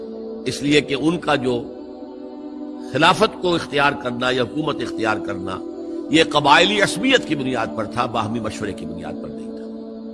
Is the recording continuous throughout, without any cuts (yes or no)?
no